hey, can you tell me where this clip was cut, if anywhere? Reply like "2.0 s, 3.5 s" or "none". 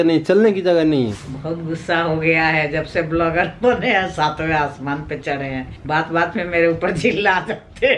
1.2 s